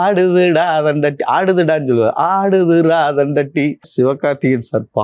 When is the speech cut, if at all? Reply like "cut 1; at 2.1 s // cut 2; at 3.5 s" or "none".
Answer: cut 1; at 3.8 s